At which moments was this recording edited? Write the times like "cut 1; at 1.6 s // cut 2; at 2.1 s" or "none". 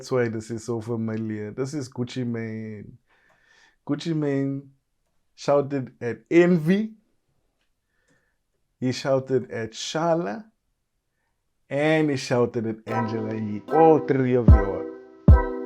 cut 1; at 14.4 s